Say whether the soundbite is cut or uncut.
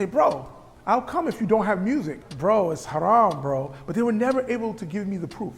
cut